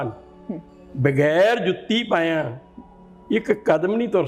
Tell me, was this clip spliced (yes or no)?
no